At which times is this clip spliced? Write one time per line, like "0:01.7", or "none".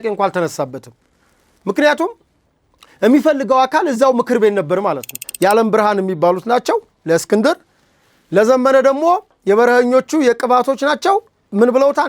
0:05.2